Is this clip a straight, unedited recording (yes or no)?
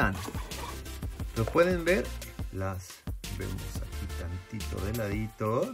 no